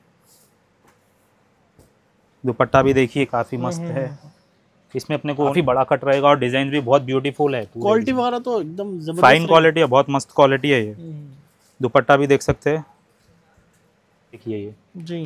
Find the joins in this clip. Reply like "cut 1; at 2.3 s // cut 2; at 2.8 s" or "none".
cut 1; at 5.5 s // cut 2; at 14.4 s